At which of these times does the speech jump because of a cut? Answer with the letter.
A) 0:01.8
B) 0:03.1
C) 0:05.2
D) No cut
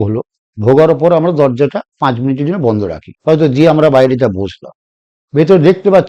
B